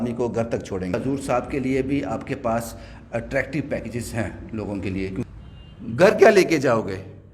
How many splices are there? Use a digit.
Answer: 2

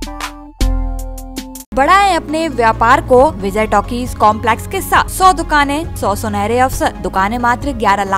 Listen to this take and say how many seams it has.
5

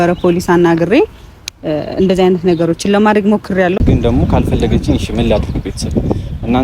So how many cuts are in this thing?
1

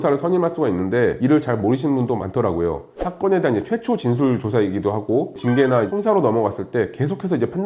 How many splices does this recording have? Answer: 1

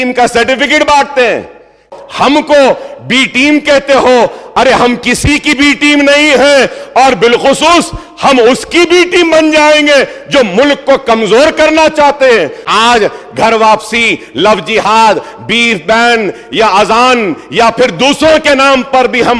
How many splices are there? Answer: 2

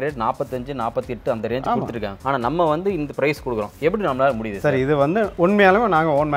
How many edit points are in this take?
0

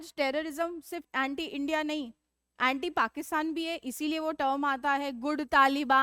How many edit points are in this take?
1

